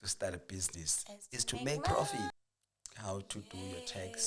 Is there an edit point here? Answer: yes; 1 cut; at 2.3 s

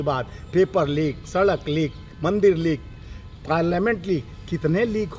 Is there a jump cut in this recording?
no; 0 cuts

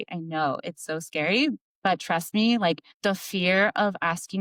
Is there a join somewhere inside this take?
no; 0 cuts

